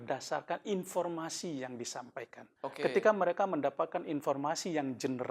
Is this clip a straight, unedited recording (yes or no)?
no